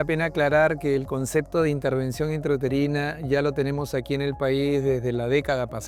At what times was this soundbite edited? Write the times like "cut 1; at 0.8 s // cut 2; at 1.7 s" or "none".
none